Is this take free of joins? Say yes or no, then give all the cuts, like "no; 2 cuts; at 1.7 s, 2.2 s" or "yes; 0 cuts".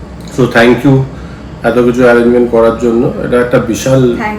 yes; 0 cuts